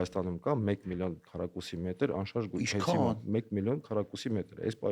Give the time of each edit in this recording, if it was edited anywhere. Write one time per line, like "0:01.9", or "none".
none